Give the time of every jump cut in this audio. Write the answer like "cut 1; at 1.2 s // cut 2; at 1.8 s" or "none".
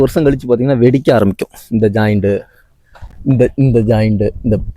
none